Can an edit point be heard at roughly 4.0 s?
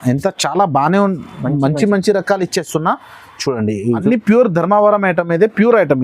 yes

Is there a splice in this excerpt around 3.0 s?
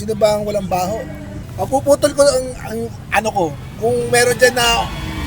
no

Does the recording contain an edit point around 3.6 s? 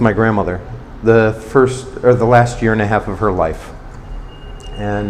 no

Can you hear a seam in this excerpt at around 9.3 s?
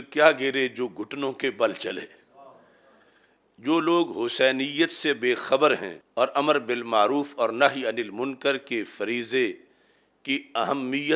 no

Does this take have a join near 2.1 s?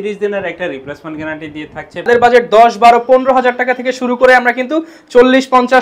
yes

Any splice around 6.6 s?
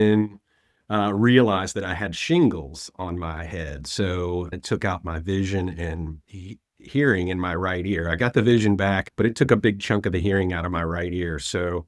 no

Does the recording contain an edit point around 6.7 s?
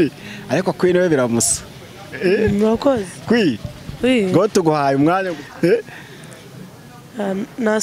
no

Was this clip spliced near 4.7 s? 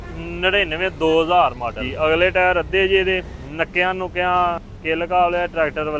yes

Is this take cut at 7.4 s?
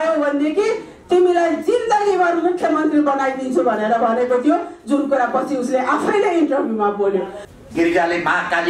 yes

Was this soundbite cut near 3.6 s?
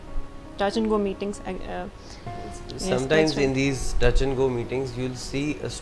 no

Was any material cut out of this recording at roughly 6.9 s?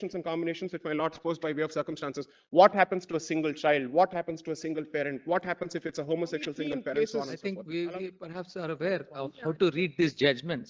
yes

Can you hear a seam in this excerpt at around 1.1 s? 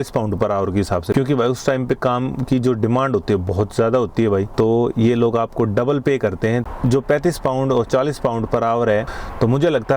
yes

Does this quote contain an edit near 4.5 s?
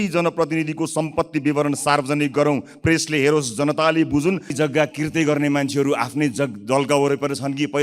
yes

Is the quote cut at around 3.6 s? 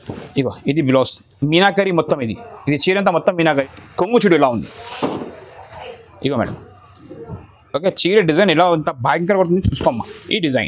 yes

